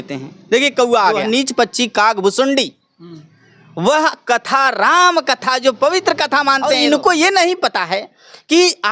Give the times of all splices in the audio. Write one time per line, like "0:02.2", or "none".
0:01.2
0:06.7